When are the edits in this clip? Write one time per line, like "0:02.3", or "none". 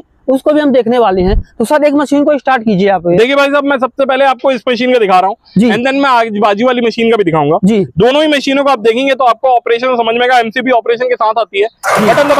none